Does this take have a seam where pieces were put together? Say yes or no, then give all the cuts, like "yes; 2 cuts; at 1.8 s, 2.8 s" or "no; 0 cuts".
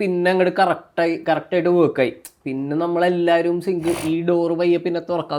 no; 0 cuts